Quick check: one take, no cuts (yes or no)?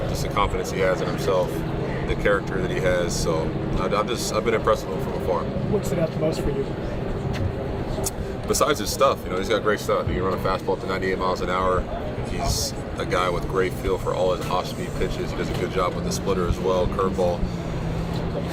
yes